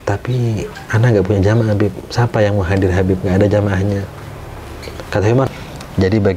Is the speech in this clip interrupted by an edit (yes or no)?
yes